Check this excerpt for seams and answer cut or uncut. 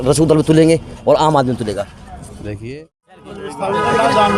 cut